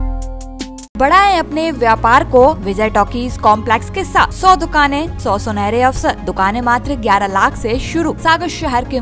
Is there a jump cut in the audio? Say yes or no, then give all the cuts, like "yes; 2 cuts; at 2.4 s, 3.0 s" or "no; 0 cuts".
yes; 6 cuts; at 1.0 s, 2.6 s, 4.3 s, 5.1 s, 6.2 s, 8.2 s